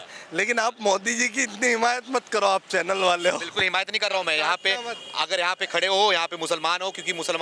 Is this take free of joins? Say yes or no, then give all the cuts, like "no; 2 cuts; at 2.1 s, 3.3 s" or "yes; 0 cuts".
yes; 0 cuts